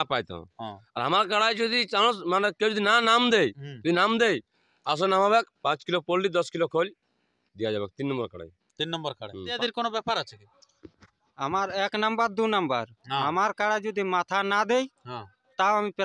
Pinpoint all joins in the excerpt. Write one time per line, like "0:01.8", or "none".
0:09.6

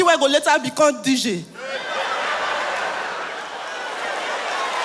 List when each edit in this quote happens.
0:03.7

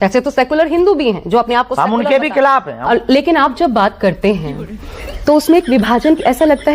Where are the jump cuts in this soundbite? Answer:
0:02.7

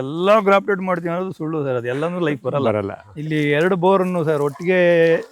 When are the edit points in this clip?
0:03.0

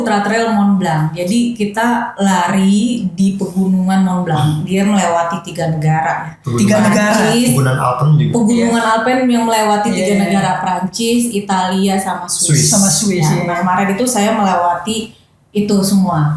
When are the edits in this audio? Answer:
none

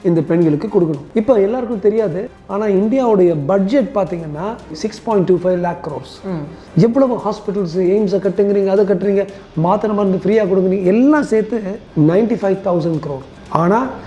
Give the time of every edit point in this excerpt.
0:04.8
0:11.8

